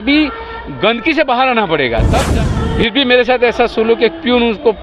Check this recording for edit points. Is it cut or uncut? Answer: cut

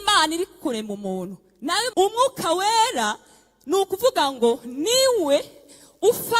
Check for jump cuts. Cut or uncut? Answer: cut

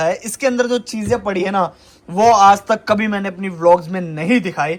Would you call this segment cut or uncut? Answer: uncut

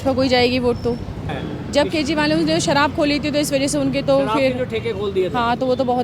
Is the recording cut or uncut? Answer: cut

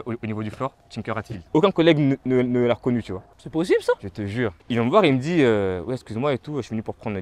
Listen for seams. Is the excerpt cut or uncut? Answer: cut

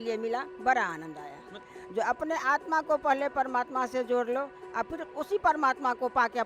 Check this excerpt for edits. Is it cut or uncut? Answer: cut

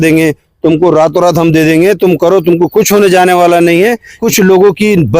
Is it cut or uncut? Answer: cut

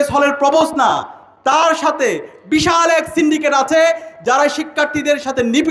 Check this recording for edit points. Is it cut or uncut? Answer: uncut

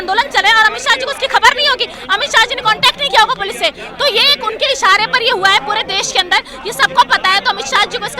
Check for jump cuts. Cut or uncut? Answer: uncut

